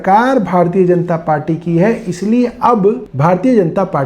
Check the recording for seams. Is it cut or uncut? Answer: cut